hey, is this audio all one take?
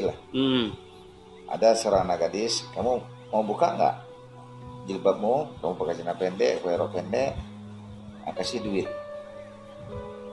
no; 1 cut; at 9.4 s

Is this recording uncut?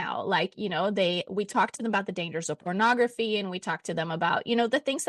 yes; 0 cuts

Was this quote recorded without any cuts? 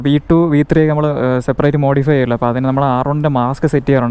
yes; 0 cuts

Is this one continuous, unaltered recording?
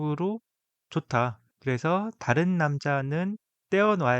no; 1 cut; at 1.5 s

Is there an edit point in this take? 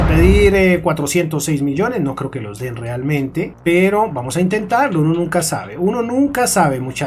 no; 0 cuts

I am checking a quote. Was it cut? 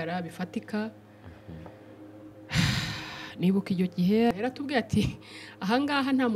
yes; 1 cut; at 4.3 s

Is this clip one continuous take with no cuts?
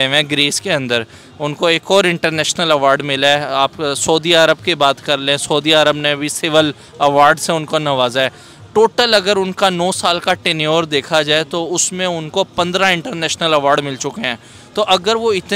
yes; 0 cuts

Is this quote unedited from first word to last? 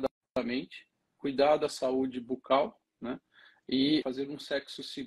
no; 1 cut; at 4.1 s

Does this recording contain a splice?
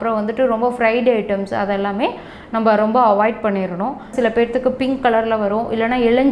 yes; 1 cut; at 4.1 s

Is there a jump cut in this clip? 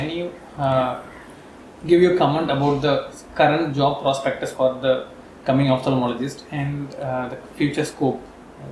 no; 0 cuts

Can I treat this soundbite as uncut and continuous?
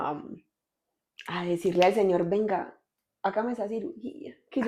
yes; 0 cuts

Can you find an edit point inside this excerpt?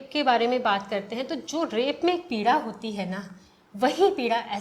no; 0 cuts

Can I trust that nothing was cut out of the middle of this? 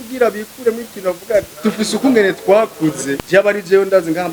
no; 2 cuts; at 1.5 s, 3.1 s

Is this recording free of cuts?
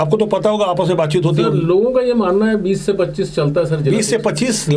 yes; 0 cuts

